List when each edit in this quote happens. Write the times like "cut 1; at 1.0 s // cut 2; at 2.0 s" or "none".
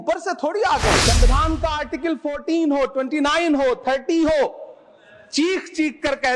cut 1; at 1.0 s